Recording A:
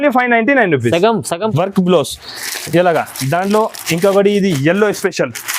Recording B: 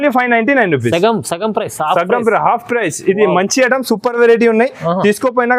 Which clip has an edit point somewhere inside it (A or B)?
A